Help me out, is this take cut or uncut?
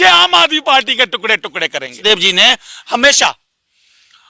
cut